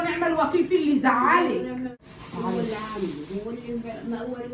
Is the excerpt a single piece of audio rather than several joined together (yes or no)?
yes